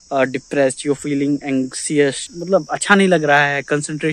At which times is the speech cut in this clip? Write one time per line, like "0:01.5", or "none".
none